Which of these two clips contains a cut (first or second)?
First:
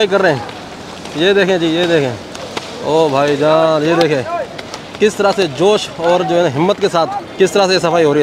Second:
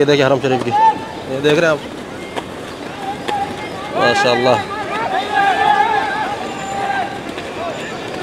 first